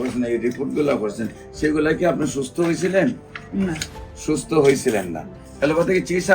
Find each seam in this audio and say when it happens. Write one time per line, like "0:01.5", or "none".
0:05.4